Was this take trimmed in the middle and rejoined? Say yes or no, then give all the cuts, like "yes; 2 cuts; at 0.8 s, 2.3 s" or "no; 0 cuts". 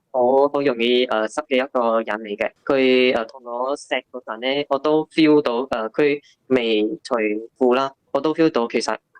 yes; 2 cuts; at 2.5 s, 7.8 s